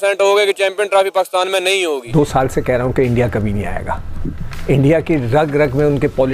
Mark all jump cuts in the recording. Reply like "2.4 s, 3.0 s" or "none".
2.0 s